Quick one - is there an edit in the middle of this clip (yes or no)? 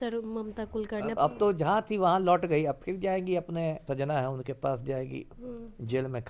yes